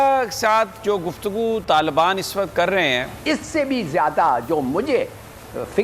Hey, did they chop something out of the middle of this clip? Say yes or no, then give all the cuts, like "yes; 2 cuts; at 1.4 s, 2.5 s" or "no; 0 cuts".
yes; 1 cut; at 3.1 s